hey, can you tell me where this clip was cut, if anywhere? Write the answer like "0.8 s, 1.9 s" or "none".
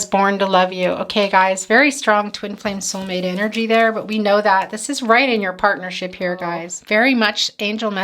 6.7 s